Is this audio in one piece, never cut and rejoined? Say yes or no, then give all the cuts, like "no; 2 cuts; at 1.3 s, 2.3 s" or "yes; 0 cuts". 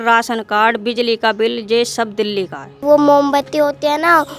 no; 1 cut; at 2.8 s